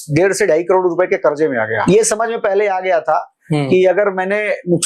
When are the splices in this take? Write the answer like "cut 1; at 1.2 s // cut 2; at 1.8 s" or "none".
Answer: cut 1; at 1.8 s